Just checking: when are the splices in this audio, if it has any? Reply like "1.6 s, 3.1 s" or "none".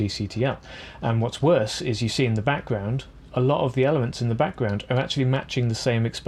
none